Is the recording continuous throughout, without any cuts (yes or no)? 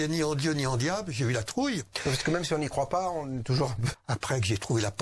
no